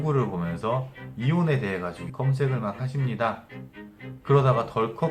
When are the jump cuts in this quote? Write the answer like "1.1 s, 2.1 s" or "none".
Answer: none

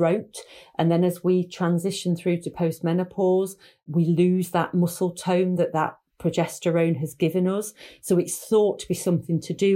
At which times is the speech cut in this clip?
none

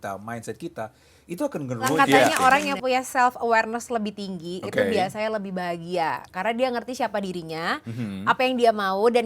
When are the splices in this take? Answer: 1.9 s

